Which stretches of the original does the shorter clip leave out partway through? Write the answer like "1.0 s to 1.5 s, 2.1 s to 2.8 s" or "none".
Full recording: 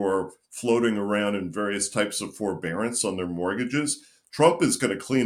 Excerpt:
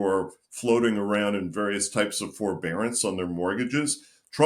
none